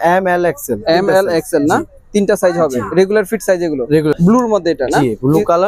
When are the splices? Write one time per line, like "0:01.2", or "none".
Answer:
0:04.2

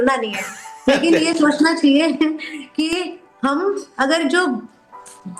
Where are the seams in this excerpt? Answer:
none

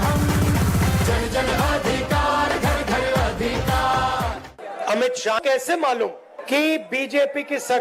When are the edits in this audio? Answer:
0:04.4
0:05.4
0:06.3

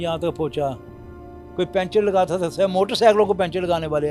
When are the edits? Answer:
none

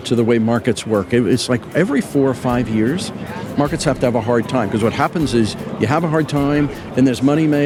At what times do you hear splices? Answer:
none

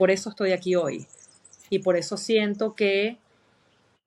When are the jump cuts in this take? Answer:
none

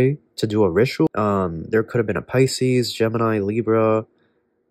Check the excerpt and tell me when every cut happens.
0:01.1

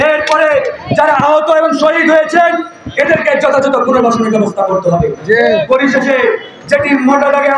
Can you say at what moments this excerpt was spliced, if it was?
none

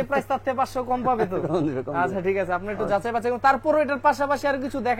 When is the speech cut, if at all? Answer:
none

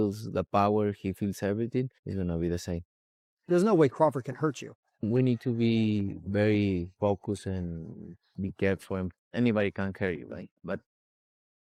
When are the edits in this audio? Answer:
none

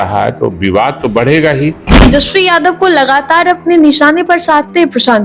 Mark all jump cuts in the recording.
0:02.0

